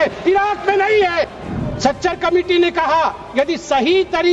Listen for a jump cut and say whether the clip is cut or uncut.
cut